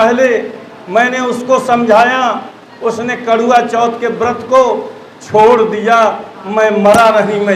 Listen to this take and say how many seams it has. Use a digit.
0